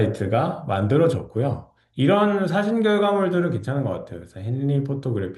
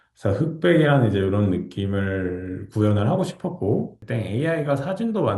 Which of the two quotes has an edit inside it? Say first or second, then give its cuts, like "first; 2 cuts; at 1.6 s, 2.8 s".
second; 1 cut; at 4.0 s